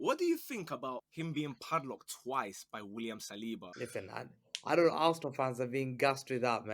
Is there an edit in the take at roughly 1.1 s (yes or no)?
yes